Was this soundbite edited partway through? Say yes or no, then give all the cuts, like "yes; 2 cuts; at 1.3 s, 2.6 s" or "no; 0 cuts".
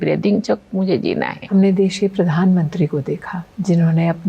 yes; 1 cut; at 1.4 s